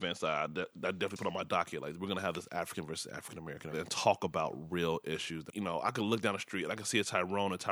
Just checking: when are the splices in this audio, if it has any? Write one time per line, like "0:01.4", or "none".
0:03.7
0:05.4

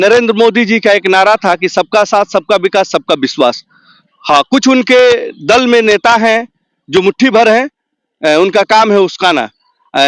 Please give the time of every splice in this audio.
none

